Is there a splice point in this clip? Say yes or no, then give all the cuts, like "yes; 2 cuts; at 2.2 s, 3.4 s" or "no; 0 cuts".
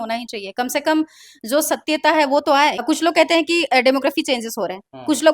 yes; 1 cut; at 2.8 s